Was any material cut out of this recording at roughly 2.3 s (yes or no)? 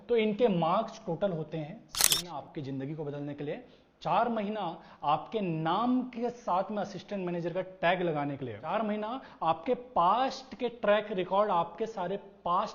yes